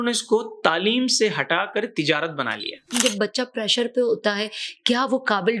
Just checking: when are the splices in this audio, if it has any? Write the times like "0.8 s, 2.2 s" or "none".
2.9 s